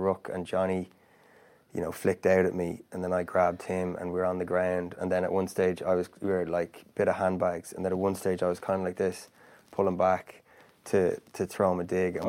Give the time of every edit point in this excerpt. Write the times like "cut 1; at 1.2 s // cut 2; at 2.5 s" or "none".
none